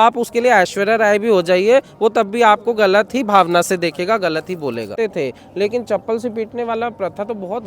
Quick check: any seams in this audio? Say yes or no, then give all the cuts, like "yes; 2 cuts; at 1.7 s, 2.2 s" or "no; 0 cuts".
yes; 1 cut; at 4.9 s